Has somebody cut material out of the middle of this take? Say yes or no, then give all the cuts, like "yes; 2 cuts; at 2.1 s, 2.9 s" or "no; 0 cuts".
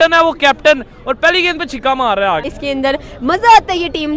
yes; 1 cut; at 2.4 s